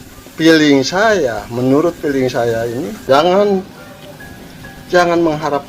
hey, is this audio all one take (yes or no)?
no